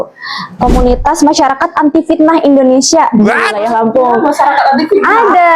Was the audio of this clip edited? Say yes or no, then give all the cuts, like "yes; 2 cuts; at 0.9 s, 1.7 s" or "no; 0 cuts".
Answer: no; 0 cuts